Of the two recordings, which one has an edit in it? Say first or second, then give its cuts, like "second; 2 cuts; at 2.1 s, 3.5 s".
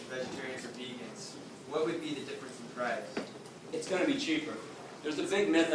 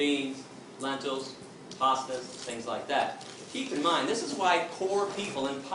first; 1 cut; at 4.8 s